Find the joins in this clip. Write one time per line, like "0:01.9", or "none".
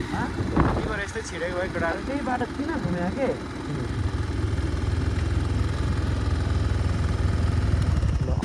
none